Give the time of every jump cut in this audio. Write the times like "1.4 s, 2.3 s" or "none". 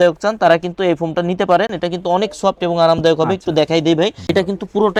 none